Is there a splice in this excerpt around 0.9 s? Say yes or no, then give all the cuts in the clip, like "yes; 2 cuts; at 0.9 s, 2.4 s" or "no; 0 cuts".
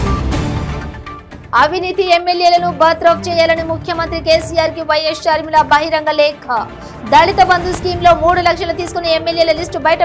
no; 0 cuts